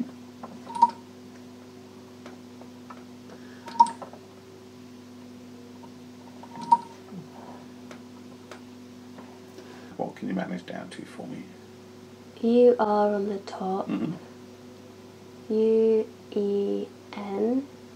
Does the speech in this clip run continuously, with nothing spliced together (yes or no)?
no